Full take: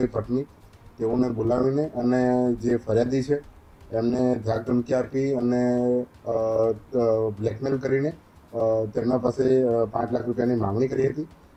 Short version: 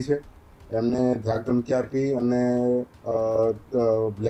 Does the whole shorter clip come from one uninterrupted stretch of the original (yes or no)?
yes